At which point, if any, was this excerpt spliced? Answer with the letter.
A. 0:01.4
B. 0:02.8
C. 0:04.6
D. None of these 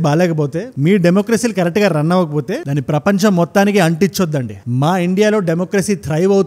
D